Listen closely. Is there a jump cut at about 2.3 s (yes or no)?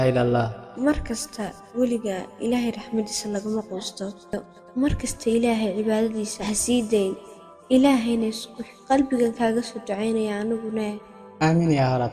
no